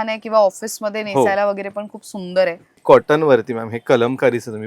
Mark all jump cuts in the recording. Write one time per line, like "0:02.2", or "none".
0:02.7